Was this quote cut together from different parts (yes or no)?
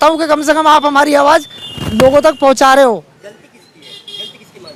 no